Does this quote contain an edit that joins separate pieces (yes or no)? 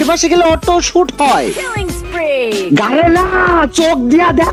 no